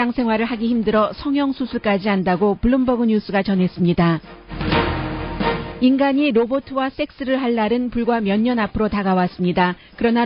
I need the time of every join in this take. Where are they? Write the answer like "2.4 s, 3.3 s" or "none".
3.1 s